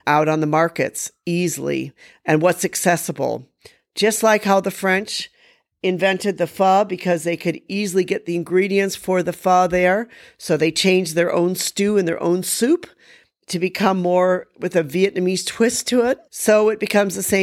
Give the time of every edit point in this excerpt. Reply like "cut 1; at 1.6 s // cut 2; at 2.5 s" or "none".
cut 1; at 16.3 s